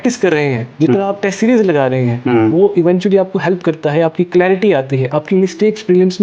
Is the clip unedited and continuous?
yes; 0 cuts

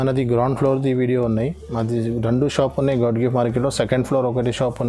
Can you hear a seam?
no; 0 cuts

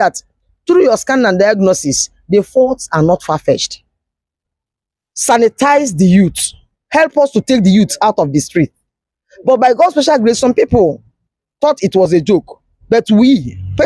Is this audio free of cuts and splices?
no; 1 cut; at 4.3 s

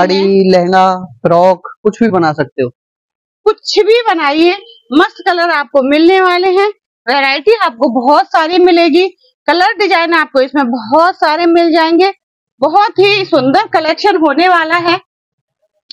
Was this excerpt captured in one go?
yes; 0 cuts

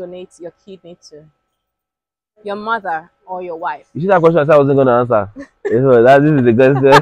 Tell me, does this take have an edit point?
no; 0 cuts

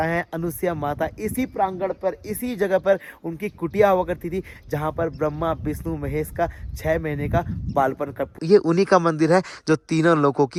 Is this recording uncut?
yes; 0 cuts

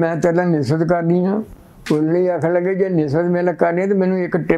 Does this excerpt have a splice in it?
no; 0 cuts

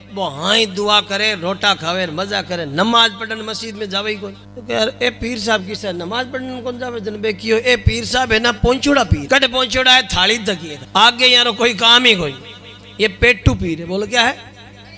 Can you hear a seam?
yes; 3 cuts; at 4.5 s, 9.2 s, 10.7 s

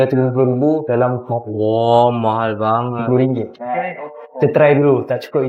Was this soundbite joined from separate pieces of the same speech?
no; 0 cuts

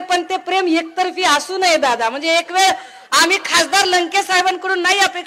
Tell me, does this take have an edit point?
no; 0 cuts

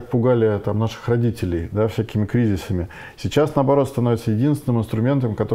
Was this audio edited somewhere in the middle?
no; 0 cuts

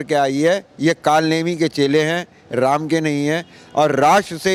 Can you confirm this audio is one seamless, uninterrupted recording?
yes; 0 cuts

